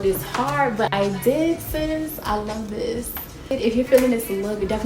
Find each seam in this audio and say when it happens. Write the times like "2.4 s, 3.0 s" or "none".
3.6 s